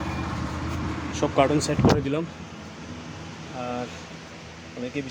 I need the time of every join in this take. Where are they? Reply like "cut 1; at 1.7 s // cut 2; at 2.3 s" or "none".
none